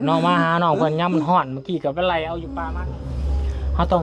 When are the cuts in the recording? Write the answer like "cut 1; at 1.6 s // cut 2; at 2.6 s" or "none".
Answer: cut 1; at 2.6 s